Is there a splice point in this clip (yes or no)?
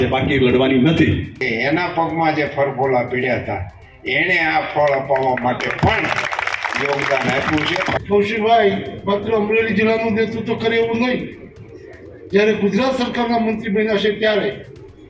yes